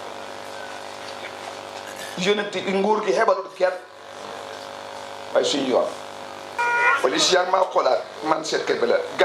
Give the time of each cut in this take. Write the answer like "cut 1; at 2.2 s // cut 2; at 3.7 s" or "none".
cut 1; at 6.6 s